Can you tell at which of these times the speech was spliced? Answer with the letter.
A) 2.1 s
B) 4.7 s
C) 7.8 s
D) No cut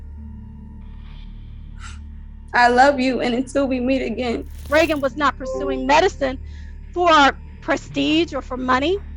B